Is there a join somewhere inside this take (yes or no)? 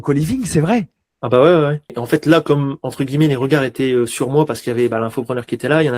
yes